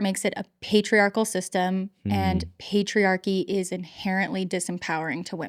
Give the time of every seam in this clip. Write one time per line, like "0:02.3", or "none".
none

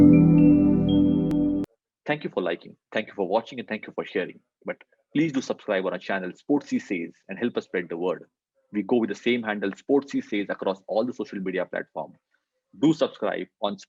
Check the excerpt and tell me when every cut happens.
none

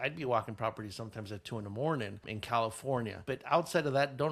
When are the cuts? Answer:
0:02.3

